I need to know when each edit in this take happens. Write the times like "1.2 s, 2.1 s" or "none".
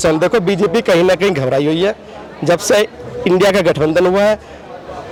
none